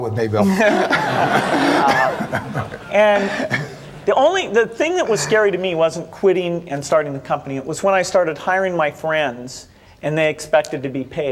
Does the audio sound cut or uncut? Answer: uncut